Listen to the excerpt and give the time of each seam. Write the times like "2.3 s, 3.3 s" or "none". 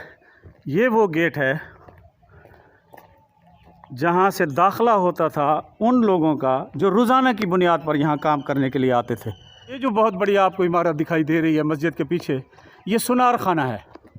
9.8 s